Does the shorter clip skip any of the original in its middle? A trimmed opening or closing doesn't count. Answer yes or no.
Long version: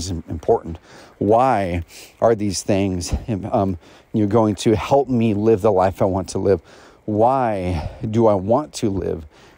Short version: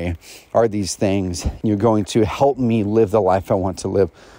yes